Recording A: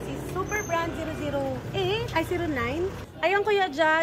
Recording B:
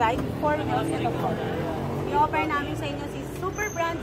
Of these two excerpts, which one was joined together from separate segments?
A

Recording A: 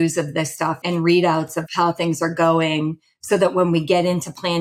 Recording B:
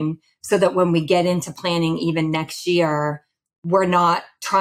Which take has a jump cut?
A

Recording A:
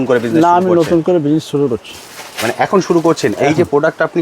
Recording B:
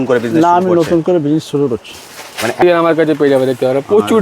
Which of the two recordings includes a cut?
B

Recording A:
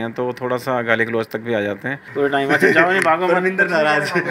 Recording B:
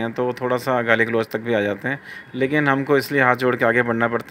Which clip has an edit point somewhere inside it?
A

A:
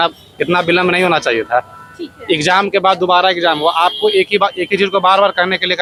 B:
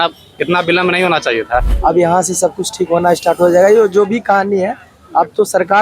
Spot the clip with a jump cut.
B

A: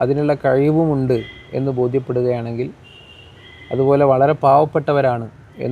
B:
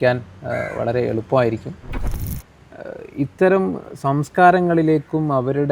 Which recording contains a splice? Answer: B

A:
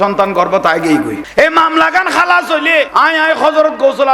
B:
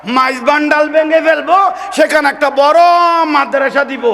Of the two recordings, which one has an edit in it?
A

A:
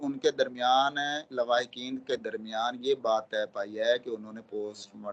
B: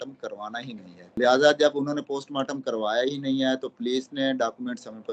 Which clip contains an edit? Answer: B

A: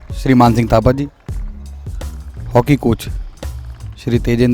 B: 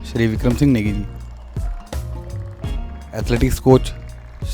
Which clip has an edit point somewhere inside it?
B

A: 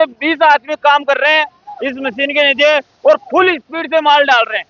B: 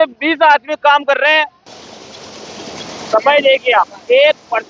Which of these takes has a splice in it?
B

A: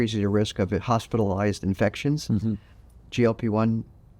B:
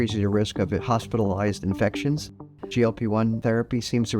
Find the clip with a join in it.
B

